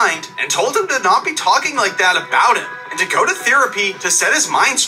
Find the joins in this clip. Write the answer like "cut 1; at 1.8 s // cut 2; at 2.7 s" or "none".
none